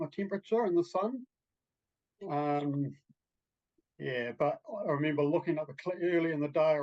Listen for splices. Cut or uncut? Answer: uncut